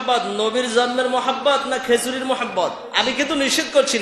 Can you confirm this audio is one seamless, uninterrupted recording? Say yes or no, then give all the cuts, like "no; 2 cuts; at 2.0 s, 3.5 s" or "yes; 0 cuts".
no; 1 cut; at 2.8 s